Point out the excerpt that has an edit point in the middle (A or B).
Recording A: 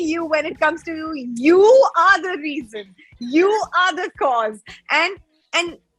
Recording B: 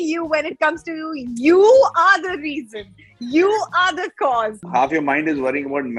B